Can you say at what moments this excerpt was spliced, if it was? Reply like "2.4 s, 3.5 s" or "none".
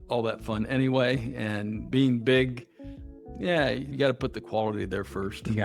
none